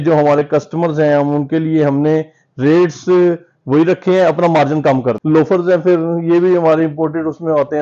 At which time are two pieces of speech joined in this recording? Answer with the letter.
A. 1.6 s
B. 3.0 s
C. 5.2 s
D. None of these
C